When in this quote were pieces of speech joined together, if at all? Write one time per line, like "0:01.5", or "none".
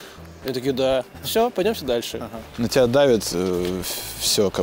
0:02.4